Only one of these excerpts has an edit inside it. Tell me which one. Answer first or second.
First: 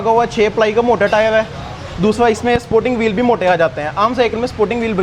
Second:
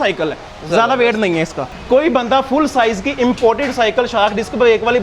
second